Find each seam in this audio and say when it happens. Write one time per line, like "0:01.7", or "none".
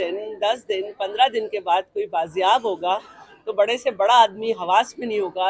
none